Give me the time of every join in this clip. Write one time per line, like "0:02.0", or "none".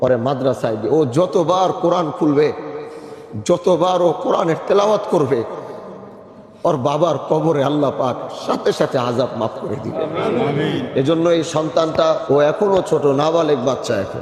0:12.2